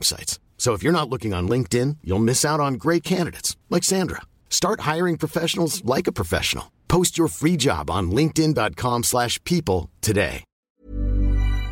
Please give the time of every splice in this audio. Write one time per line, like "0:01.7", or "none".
0:10.7